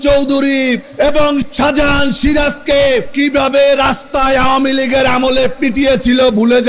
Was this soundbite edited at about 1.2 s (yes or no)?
yes